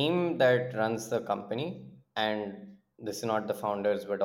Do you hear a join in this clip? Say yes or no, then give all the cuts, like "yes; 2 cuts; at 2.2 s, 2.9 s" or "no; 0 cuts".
no; 0 cuts